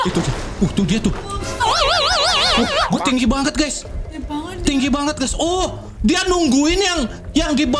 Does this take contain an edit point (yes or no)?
no